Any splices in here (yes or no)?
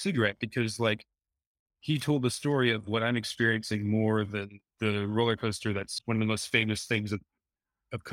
yes